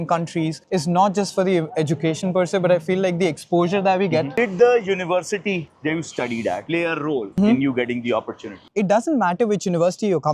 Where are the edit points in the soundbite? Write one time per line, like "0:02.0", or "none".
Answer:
0:04.3
0:08.6